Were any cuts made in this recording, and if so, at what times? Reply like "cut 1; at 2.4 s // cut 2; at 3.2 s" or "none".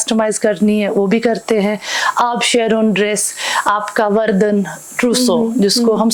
none